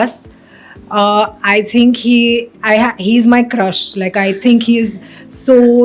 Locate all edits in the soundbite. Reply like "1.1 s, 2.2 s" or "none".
none